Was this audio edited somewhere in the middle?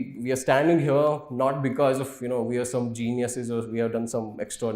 no; 0 cuts

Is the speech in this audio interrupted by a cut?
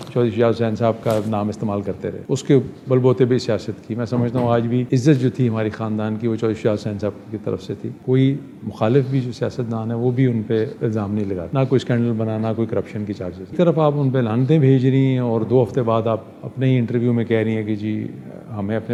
no; 0 cuts

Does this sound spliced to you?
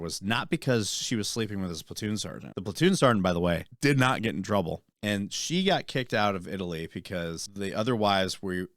yes; 4 cuts; at 2.4 s, 3.7 s, 4.9 s, 7.4 s

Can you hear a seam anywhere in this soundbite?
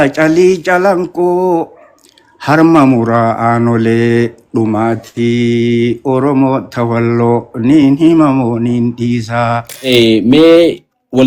yes; 1 cut; at 9.7 s

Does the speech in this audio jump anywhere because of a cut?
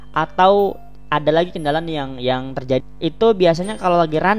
yes; 1 cut; at 2.8 s

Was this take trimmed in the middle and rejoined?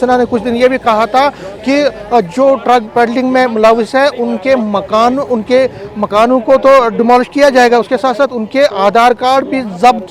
no; 0 cuts

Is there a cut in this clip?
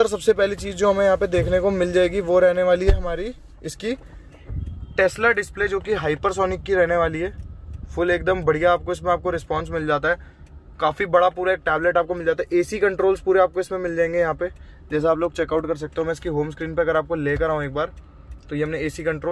no; 0 cuts

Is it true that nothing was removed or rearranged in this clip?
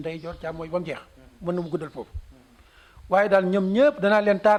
yes; 0 cuts

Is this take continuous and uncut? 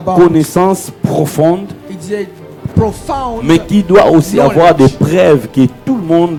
yes; 0 cuts

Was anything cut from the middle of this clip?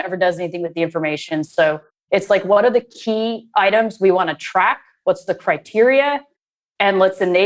no; 0 cuts

